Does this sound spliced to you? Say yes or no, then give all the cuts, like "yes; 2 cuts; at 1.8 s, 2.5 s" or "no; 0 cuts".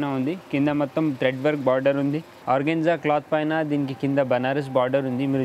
yes; 1 cut; at 2.3 s